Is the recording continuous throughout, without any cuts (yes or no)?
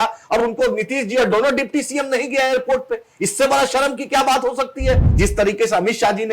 no